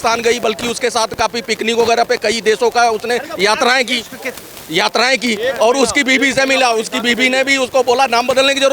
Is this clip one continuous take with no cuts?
yes; 0 cuts

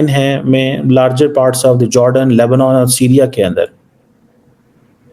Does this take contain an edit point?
no; 0 cuts

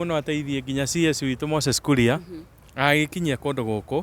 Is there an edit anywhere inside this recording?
no; 0 cuts

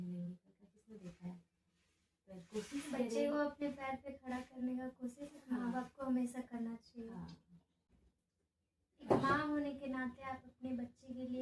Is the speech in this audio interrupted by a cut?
yes; 1 cut; at 7.8 s

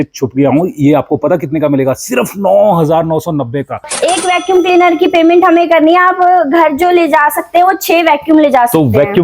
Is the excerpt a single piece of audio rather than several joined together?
no; 1 cut; at 3.9 s

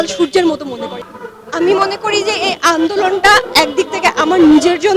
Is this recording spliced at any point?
yes; 1 cut; at 1.0 s

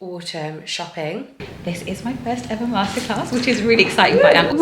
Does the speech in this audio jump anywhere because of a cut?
yes; 1 cut; at 1.4 s

